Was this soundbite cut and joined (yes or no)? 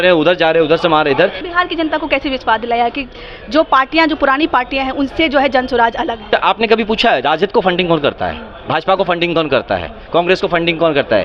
yes